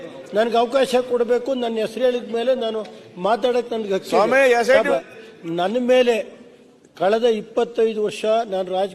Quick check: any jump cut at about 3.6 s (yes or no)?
no